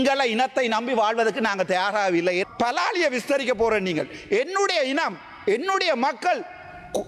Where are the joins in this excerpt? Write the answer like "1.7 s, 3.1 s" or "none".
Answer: 2.5 s